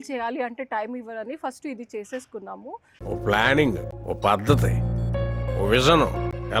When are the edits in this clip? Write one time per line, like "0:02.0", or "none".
none